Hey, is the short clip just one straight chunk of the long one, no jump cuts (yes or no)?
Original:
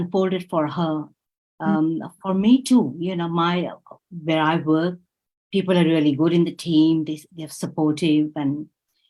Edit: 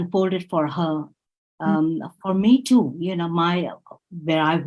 yes